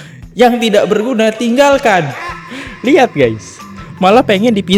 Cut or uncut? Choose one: uncut